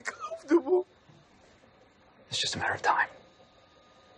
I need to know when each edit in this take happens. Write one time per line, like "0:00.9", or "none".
0:01.3